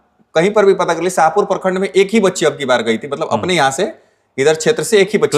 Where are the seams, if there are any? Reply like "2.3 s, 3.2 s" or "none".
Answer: none